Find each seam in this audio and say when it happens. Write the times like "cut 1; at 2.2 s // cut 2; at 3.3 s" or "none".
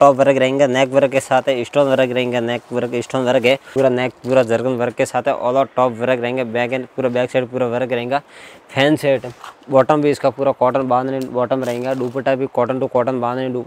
cut 1; at 3.7 s // cut 2; at 9.3 s